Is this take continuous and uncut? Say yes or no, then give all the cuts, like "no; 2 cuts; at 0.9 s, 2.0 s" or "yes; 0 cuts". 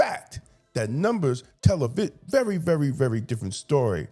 yes; 0 cuts